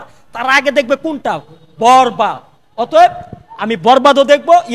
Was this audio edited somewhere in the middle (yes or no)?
no